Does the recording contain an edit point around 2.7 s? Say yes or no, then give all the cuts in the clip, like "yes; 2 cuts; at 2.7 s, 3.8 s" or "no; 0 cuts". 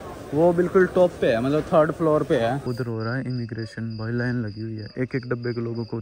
yes; 1 cut; at 2.7 s